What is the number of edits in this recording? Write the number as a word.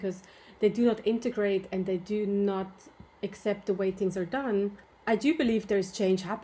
zero